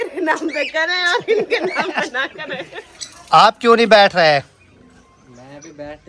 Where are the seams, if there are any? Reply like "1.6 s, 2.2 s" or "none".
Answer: 2.8 s